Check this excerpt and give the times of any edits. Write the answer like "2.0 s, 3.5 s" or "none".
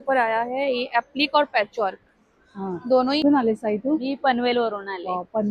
3.2 s